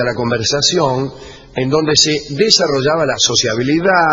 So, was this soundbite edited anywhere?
no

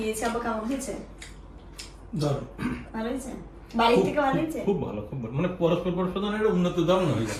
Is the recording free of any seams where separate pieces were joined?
yes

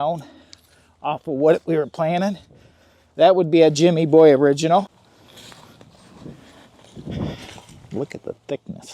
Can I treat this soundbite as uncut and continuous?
no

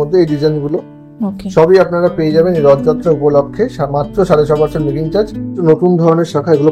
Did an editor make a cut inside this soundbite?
yes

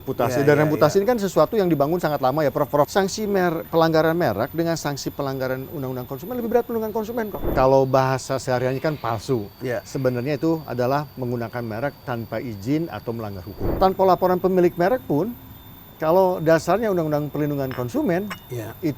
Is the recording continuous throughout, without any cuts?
no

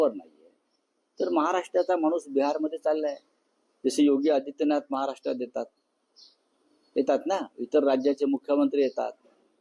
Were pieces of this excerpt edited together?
no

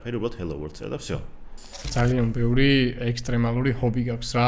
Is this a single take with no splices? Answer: no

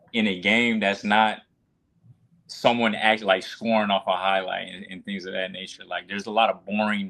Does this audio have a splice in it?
no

